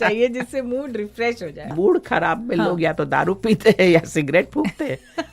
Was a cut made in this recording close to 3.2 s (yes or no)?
no